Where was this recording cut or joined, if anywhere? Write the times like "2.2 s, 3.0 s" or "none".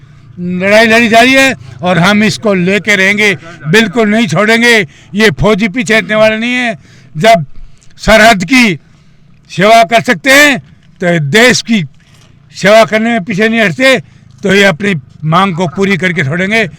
none